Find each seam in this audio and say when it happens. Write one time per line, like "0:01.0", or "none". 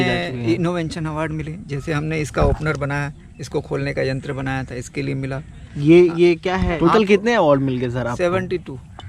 0:06.8